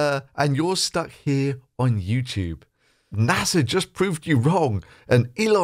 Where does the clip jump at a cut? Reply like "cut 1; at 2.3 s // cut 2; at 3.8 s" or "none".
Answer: cut 1; at 3.1 s